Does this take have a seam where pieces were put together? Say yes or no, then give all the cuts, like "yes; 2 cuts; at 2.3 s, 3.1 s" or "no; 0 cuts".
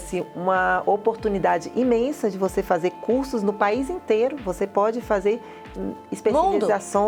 no; 0 cuts